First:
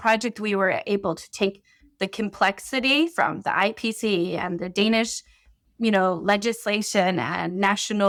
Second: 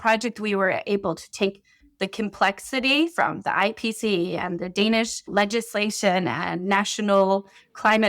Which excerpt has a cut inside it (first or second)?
second